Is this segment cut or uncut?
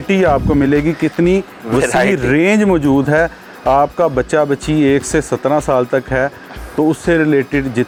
uncut